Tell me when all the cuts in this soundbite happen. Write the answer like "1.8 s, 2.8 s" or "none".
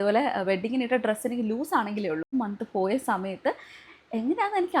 2.3 s